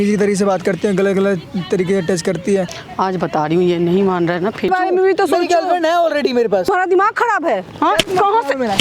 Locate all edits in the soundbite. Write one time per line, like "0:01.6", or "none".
0:02.8
0:04.7
0:06.7